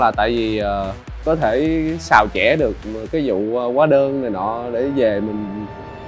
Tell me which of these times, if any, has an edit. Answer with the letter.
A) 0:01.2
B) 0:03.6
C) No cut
A